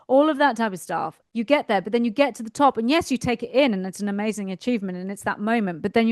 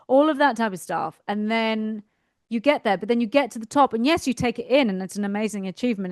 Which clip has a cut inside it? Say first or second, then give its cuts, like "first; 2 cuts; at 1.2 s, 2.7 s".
first; 1 cut; at 1.2 s